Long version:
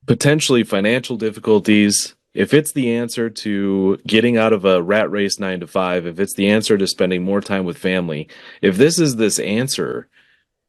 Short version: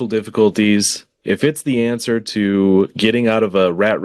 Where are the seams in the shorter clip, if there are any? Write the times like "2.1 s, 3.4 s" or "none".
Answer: none